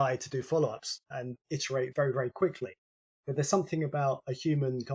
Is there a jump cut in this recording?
no; 0 cuts

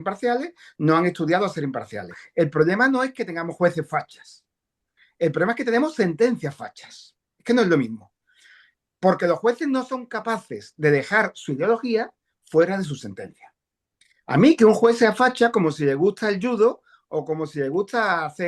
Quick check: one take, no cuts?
no; 1 cut; at 2.2 s

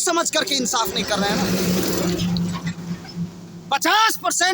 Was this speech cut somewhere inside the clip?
no; 0 cuts

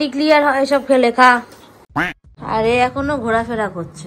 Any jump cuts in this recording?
yes; 1 cut; at 2.1 s

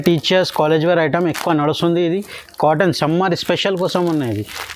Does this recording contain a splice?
no; 0 cuts

